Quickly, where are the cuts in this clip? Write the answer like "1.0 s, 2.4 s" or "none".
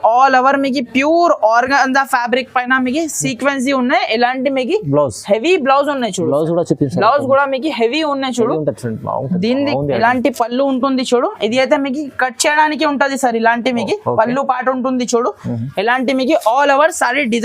9.7 s